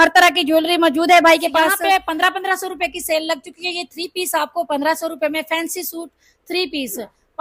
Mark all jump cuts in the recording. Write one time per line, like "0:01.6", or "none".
0:01.8